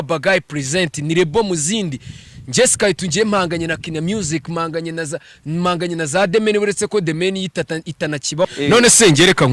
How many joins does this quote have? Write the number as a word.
one